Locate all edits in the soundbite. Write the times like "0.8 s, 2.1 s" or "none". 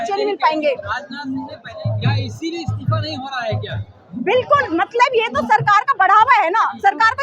1.7 s